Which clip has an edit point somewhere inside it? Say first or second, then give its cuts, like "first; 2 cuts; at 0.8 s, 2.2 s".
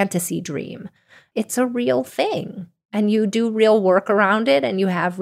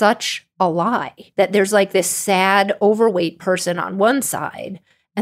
second; 1 cut; at 1.2 s